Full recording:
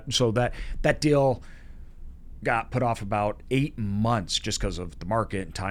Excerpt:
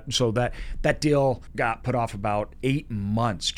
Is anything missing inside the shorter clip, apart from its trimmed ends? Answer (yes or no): yes